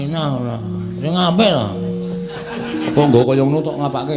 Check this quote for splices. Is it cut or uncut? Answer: cut